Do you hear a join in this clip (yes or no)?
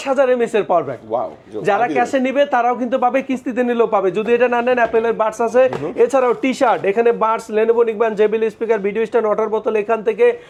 no